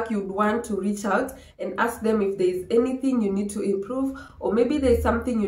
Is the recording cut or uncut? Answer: uncut